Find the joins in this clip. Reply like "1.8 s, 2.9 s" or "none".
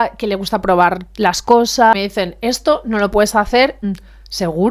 1.9 s, 3.8 s